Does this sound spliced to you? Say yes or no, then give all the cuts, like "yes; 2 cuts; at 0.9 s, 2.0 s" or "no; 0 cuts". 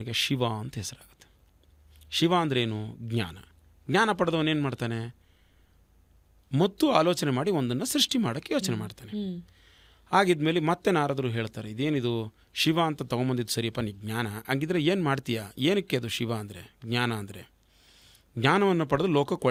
no; 0 cuts